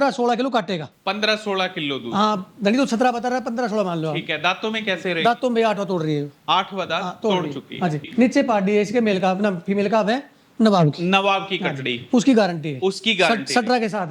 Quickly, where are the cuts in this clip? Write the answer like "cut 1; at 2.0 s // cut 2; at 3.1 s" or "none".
cut 1; at 8.0 s